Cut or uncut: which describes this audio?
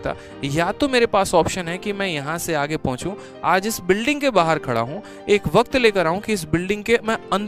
uncut